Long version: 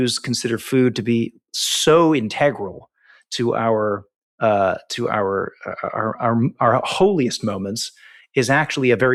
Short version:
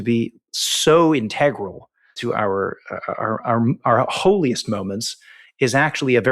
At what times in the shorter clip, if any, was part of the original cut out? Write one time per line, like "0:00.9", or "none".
0:02.1